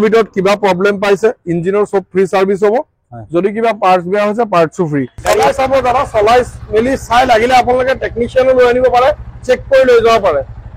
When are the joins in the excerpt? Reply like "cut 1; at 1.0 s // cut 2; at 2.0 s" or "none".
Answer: cut 1; at 5.1 s